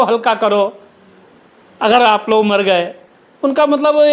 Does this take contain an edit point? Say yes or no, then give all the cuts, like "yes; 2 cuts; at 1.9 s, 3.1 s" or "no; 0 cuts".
no; 0 cuts